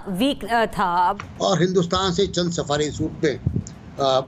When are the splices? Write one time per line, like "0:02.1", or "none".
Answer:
0:01.2

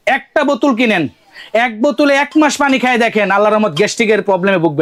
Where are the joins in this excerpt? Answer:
none

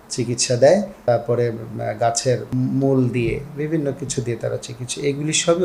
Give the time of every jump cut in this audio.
0:01.0
0:02.5

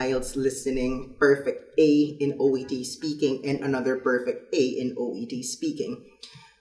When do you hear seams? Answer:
none

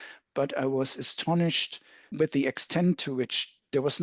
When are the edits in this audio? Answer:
0:02.0

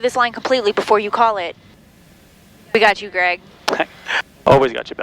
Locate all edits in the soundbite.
0:01.7

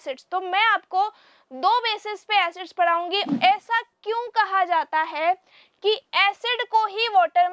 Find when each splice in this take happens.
0:03.2

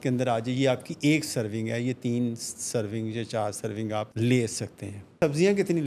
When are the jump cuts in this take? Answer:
0:04.1
0:05.1

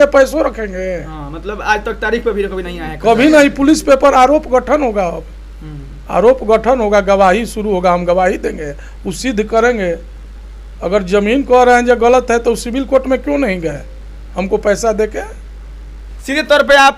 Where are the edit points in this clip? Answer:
none

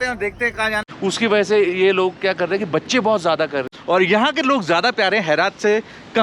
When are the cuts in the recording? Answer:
0:00.9
0:03.7

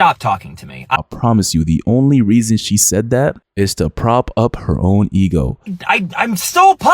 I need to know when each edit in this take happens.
0:01.0
0:03.4
0:05.7

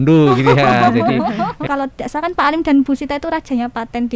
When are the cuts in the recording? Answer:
0:01.6

